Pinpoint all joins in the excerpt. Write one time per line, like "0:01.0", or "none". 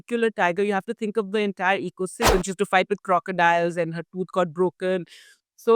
0:02.3

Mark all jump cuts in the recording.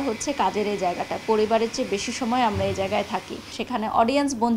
0:03.6

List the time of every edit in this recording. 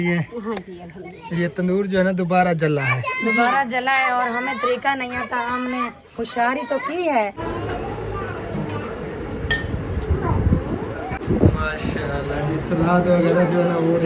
0:07.4
0:11.2

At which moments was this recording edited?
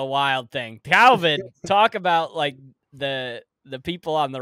none

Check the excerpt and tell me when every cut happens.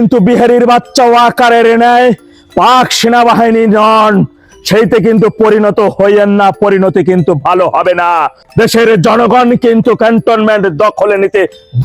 0:08.4

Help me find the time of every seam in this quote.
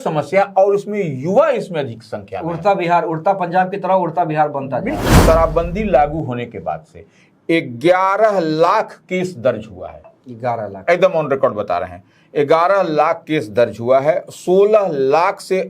0:05.2

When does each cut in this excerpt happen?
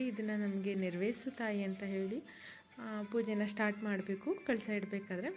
none

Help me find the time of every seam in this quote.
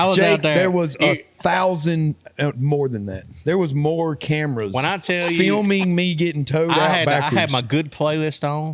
none

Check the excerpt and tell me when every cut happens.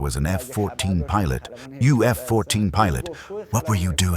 0:01.6

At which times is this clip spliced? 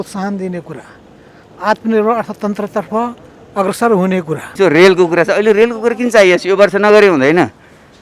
0:04.5

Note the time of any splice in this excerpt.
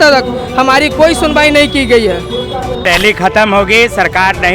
0:02.8

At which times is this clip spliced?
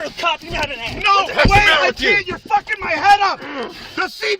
0:03.5

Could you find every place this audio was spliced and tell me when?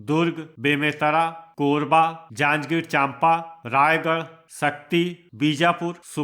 0:01.4
0:02.2
0:03.5
0:04.4
0:05.2

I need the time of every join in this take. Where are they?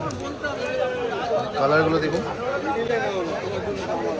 none

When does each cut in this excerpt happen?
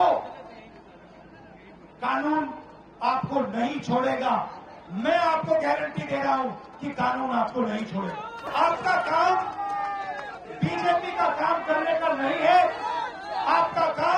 0:08.5

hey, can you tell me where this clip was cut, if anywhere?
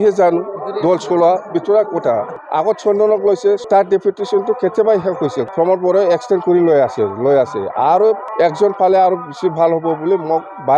0:02.4
0:03.6
0:05.5
0:08.3

